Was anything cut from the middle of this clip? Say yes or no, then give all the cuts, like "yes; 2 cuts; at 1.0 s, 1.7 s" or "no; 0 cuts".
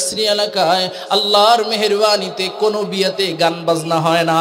no; 0 cuts